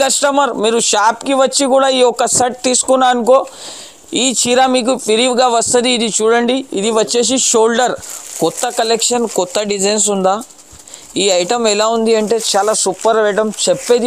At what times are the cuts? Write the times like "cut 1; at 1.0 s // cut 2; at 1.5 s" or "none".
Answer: cut 1; at 8.0 s